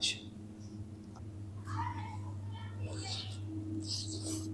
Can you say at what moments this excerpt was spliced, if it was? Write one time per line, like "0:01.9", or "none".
0:01.1